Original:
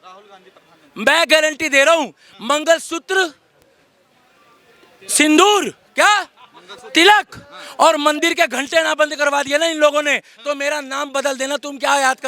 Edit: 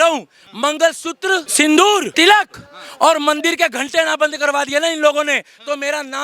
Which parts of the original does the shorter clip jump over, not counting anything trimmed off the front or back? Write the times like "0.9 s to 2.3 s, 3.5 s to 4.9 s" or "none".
3.3 s to 5.1 s, 5.7 s to 6.9 s